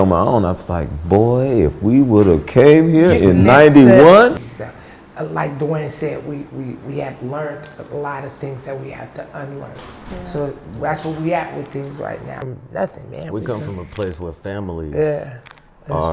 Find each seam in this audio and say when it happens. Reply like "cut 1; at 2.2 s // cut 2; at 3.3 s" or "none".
cut 1; at 4.4 s // cut 2; at 12.4 s